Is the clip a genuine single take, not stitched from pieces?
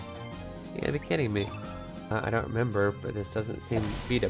no; 1 cut; at 2.1 s

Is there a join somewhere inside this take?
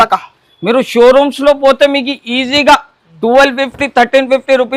no; 0 cuts

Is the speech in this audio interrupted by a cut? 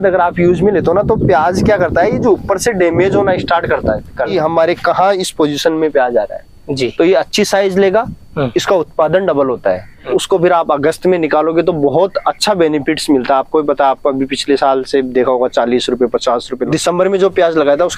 yes; 3 cuts; at 4.3 s, 10.0 s, 16.5 s

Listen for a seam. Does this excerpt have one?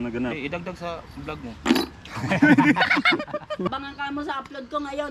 yes; 1 cut; at 3.7 s

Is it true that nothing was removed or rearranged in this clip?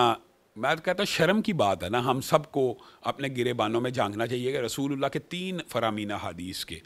yes; 0 cuts

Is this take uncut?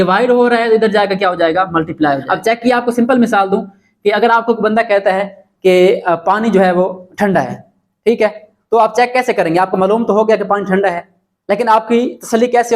no; 1 cut; at 2.3 s

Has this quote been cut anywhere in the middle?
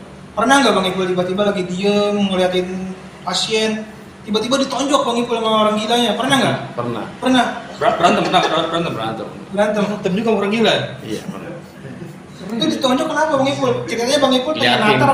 no; 0 cuts

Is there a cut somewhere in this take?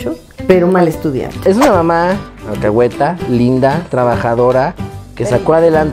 yes; 1 cut; at 1.4 s

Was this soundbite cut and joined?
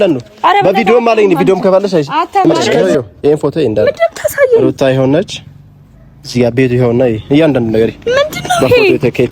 yes; 1 cut; at 2.7 s

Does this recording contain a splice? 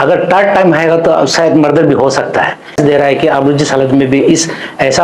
yes; 1 cut; at 2.8 s

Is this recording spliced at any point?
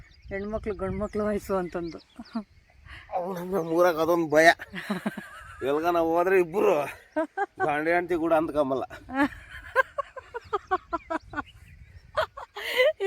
no; 0 cuts

